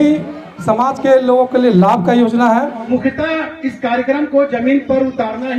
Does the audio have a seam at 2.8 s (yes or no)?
yes